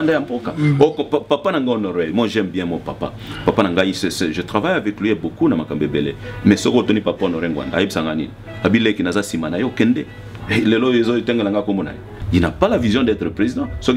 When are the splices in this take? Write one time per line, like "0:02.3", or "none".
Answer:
0:12.1